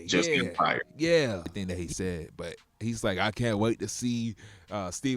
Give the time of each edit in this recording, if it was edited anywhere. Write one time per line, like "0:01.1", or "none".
0:01.5